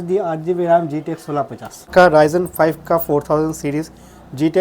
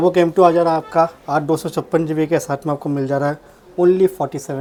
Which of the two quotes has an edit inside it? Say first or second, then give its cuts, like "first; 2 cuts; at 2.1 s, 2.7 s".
first; 1 cut; at 1.9 s